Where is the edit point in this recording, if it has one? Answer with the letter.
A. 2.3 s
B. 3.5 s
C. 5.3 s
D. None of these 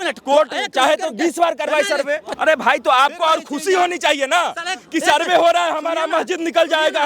A